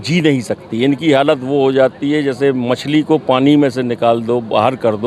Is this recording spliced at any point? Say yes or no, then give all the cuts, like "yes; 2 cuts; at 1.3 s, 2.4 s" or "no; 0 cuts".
no; 0 cuts